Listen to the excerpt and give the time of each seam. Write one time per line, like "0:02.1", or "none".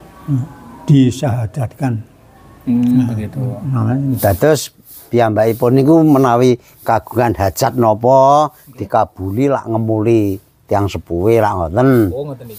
0:04.2